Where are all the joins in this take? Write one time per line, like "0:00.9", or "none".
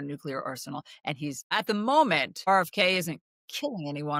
0:01.5
0:02.4